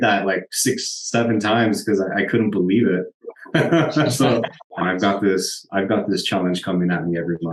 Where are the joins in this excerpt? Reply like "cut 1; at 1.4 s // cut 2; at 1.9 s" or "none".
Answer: cut 1; at 4.6 s